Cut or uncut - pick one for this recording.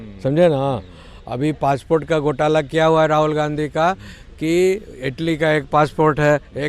uncut